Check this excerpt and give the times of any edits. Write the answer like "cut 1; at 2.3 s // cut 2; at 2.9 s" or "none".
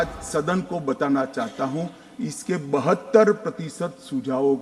none